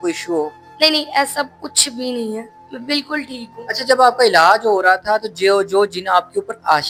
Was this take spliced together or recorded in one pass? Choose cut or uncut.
uncut